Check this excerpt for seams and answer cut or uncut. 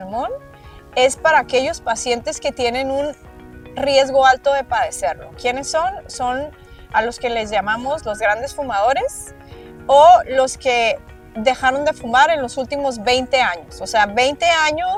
uncut